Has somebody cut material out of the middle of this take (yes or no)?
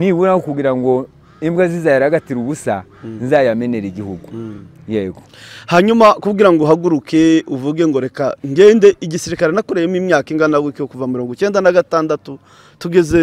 no